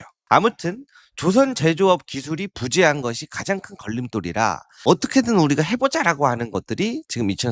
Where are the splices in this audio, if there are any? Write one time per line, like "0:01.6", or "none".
none